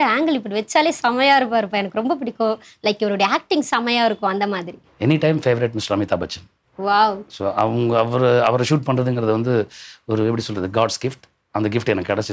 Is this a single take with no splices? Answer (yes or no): yes